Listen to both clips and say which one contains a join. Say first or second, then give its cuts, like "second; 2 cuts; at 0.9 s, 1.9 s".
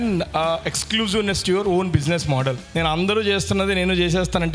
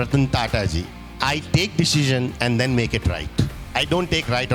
second; 1 cut; at 3.6 s